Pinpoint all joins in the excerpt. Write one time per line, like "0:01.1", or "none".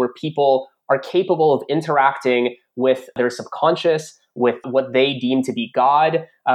0:03.1
0:04.7